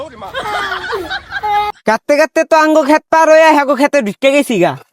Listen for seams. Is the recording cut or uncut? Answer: cut